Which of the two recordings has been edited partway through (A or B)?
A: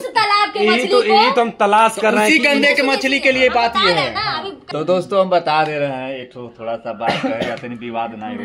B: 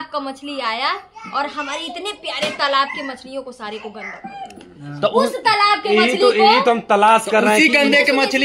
A